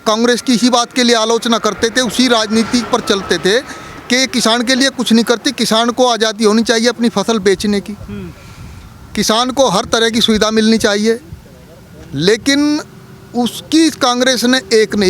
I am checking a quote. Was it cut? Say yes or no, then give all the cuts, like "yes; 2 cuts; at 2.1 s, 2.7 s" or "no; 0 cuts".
no; 0 cuts